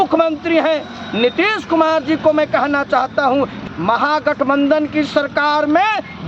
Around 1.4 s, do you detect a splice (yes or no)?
no